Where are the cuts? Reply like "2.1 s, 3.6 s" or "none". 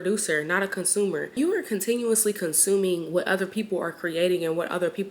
1.4 s